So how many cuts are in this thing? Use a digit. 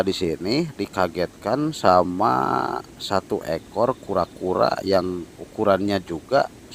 0